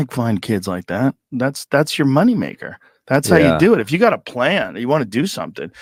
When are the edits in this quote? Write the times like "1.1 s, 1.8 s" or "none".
none

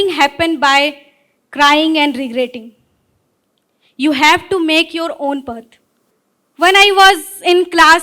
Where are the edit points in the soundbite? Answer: none

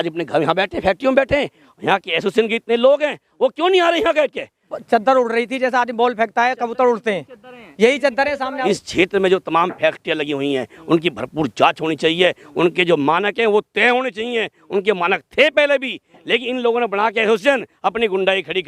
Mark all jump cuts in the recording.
4.7 s, 8.6 s

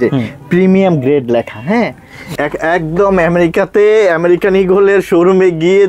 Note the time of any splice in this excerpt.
2.4 s

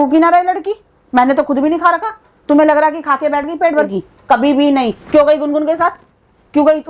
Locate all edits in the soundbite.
3.9 s

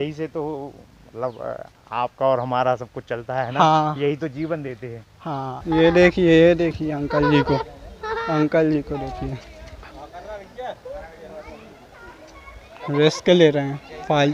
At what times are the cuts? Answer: 5.6 s

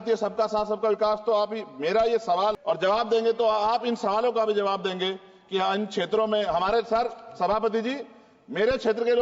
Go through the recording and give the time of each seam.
2.6 s

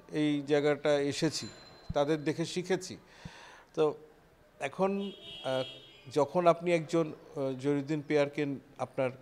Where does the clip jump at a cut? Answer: none

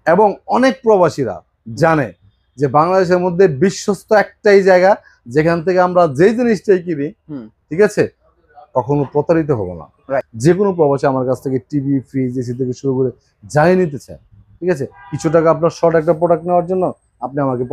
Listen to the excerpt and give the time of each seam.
10.3 s

